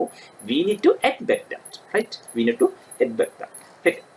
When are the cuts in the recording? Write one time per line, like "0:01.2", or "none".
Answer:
none